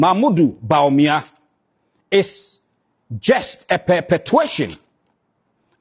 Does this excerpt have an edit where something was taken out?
no; 0 cuts

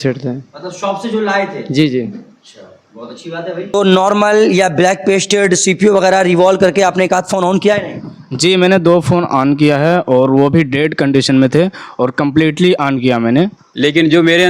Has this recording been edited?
yes; 2 cuts; at 3.7 s, 13.6 s

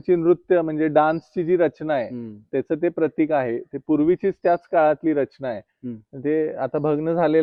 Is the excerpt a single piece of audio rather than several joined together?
yes; 0 cuts

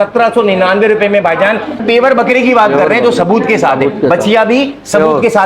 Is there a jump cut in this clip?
yes; 1 cut; at 1.8 s

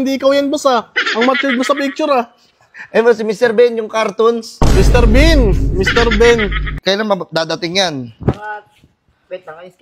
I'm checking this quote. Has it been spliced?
yes; 1 cut; at 6.7 s

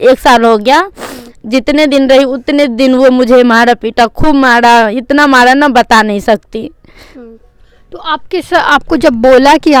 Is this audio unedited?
yes; 0 cuts

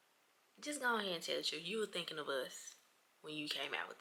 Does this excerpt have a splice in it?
no; 0 cuts

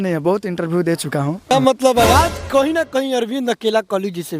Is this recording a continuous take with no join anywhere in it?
no; 1 cut; at 1.5 s

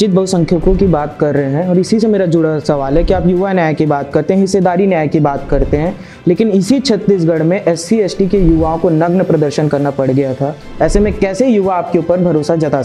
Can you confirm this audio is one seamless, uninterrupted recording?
yes; 0 cuts

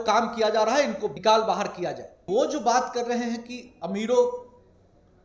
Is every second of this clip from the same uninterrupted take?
no; 2 cuts; at 1.1 s, 2.2 s

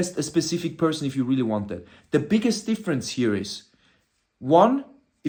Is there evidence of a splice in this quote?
no; 0 cuts

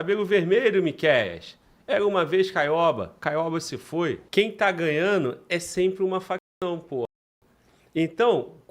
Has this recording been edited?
yes; 1 cut; at 4.2 s

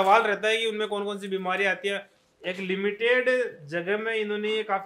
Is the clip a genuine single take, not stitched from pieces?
no; 1 cut; at 2.1 s

